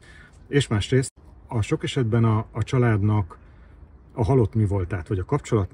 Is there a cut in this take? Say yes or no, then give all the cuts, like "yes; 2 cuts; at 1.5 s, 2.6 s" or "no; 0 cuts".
yes; 1 cut; at 1.2 s